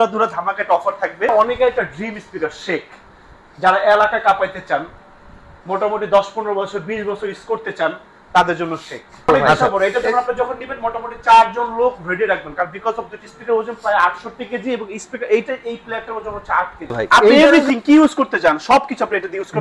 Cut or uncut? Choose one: cut